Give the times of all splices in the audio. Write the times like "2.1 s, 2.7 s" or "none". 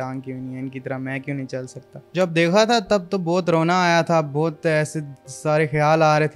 2.1 s